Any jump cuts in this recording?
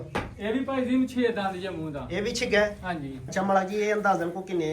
yes; 1 cut; at 3.2 s

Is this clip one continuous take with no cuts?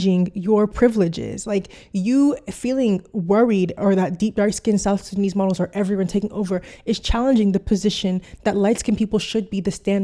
yes; 0 cuts

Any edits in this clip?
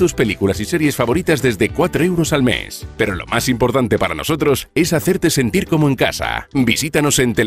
no; 0 cuts

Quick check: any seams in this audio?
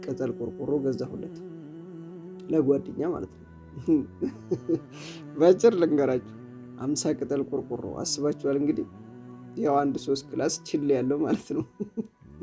no; 0 cuts

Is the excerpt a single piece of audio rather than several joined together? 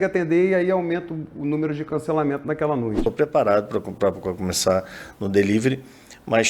no; 1 cut; at 3.0 s

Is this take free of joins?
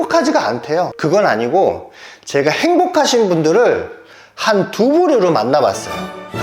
no; 1 cut; at 1.0 s

